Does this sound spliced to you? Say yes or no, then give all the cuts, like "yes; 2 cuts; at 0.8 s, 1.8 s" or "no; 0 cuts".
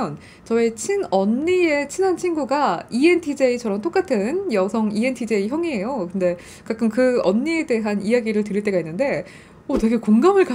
no; 0 cuts